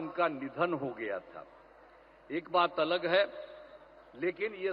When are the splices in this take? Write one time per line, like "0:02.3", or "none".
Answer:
none